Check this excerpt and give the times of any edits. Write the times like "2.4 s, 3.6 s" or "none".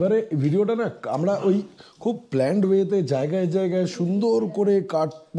none